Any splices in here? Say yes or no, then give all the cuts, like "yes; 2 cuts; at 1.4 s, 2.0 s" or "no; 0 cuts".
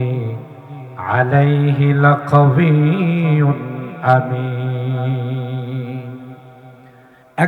no; 0 cuts